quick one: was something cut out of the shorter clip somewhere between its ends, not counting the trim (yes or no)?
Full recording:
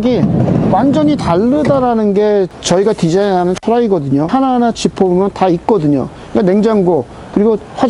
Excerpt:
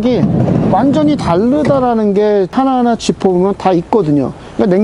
yes